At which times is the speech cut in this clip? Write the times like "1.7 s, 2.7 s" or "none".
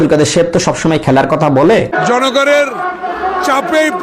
2.0 s